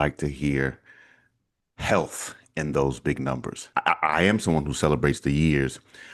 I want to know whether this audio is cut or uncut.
cut